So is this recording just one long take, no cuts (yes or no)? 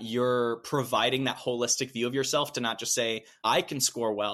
no